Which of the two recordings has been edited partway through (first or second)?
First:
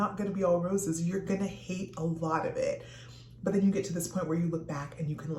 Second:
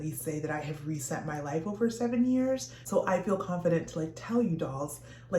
second